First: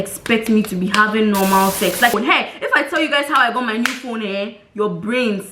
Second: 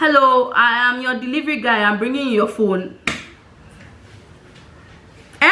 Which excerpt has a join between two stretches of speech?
first; 1 cut; at 2.1 s

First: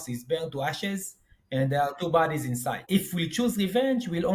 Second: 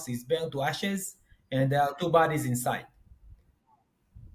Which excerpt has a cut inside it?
first; 1 cut; at 2.8 s

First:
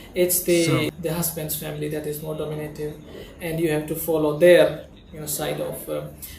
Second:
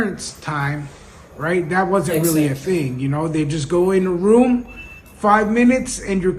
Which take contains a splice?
first; 1 cut; at 0.9 s

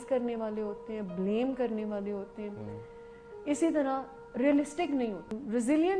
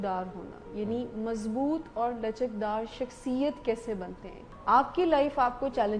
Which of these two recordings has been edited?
second; 1 cut; at 4.5 s

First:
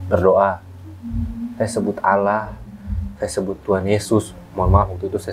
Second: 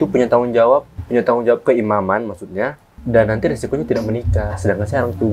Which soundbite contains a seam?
second; 2 cuts; at 1.0 s, 2.9 s

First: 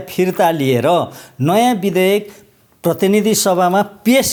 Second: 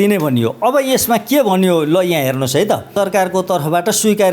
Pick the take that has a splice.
second; 1 cut; at 2.9 s

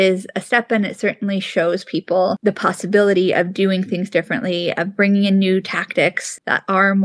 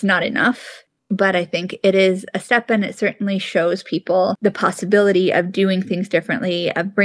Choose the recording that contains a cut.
second; 1 cut; at 0.9 s

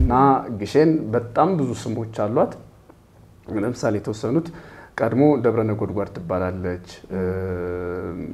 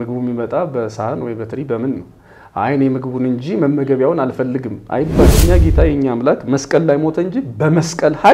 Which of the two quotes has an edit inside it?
second; 1 cut; at 5.4 s

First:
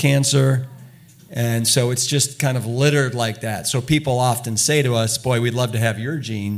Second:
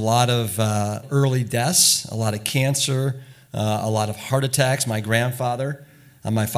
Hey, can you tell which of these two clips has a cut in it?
second; 2 cuts; at 1.0 s, 4.2 s

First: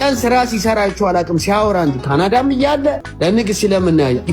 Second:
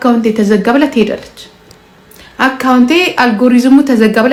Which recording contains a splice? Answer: first; 1 cut; at 3.1 s

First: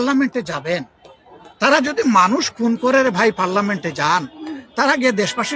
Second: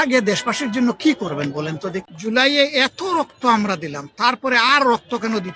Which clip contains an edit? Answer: second; 1 cut; at 2.1 s

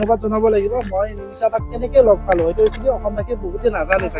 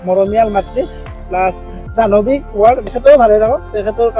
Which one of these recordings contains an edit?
second; 1 cut; at 2.9 s

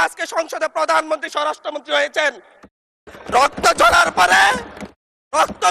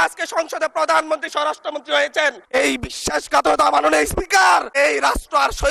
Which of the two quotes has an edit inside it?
second; 2 cuts; at 2.4 s, 4.7 s

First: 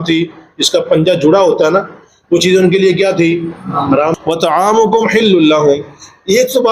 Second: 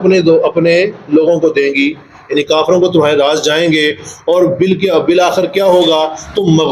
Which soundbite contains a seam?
first; 1 cut; at 4.2 s

